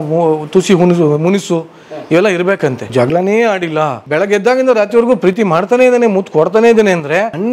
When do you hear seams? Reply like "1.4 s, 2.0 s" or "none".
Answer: 2.9 s, 4.0 s